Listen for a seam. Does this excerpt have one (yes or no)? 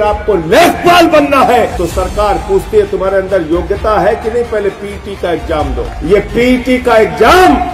yes